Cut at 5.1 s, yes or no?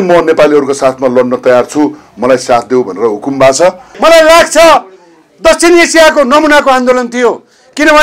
no